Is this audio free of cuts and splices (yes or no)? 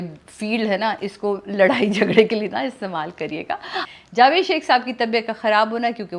no